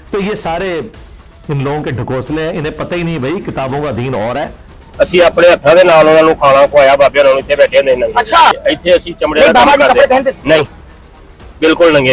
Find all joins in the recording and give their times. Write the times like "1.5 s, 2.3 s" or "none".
4.5 s, 8.5 s